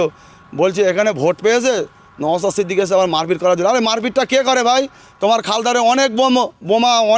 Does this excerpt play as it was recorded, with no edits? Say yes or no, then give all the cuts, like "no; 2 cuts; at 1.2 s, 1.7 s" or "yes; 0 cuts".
yes; 0 cuts